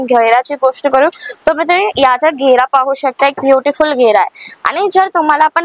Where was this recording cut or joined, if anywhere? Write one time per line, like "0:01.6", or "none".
none